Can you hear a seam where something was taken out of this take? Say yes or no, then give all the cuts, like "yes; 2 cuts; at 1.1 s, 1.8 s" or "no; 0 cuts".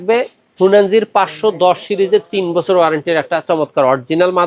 no; 0 cuts